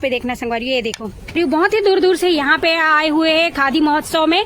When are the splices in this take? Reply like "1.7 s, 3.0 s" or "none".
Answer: 1.4 s